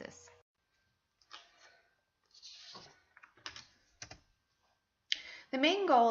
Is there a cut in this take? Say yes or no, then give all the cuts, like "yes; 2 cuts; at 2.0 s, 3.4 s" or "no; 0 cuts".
no; 0 cuts